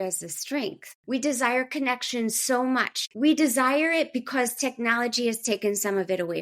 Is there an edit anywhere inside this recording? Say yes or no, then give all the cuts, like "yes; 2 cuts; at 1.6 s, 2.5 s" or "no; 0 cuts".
yes; 2 cuts; at 0.9 s, 3.0 s